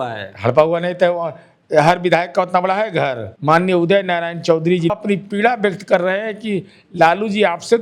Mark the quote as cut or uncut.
cut